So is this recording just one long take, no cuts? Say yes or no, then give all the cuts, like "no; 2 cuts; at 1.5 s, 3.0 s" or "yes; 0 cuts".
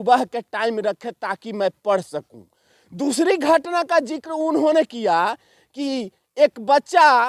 yes; 0 cuts